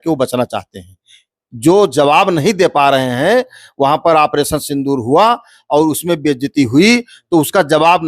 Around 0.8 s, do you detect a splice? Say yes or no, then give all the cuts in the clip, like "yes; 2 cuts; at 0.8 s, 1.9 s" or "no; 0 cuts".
no; 0 cuts